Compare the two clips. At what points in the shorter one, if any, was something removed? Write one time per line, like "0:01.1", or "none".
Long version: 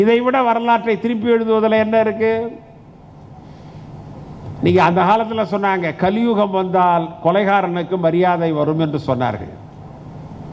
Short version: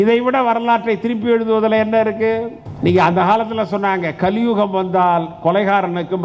0:02.6